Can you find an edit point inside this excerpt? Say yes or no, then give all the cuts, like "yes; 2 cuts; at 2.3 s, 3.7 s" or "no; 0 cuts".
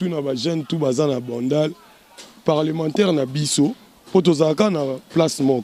no; 0 cuts